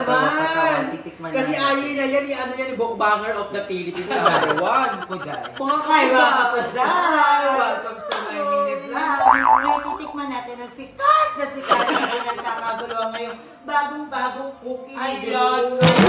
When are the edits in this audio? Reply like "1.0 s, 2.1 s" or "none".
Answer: none